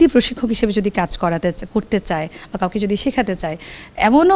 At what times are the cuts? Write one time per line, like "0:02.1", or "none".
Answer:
none